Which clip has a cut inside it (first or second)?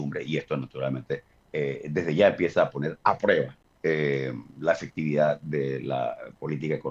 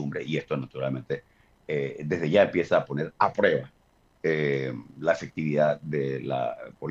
first